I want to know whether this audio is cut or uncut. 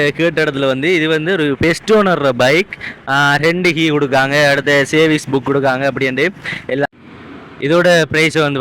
cut